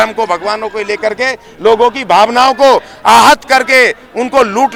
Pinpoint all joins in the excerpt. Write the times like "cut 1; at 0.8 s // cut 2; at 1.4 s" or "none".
none